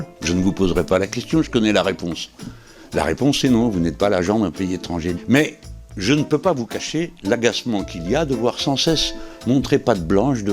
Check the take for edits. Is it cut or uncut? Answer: cut